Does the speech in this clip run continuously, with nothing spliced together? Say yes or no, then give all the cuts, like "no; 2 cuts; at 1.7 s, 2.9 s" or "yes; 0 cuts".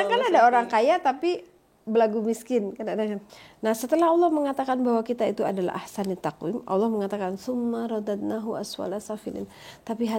no; 1 cut; at 3.3 s